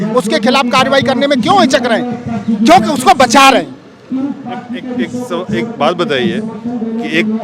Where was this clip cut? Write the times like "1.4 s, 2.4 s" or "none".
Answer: none